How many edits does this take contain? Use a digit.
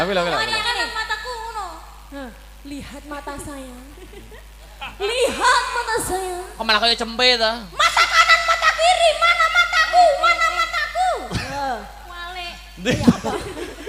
0